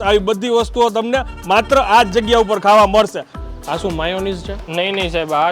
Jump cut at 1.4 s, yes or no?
no